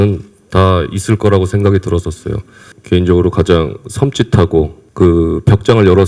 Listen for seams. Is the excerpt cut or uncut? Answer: cut